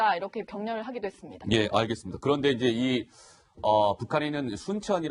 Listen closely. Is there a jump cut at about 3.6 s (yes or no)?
yes